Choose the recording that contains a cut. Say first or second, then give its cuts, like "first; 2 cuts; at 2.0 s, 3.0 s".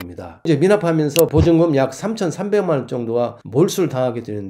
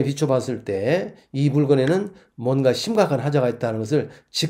first; 1 cut; at 3.4 s